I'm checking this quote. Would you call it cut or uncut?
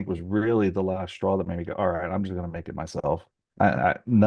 uncut